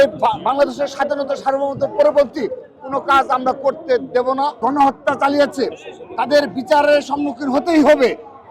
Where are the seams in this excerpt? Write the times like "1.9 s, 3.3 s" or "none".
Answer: 4.6 s